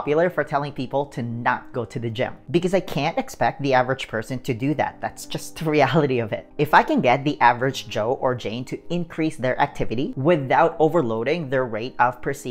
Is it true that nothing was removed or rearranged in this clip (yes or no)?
no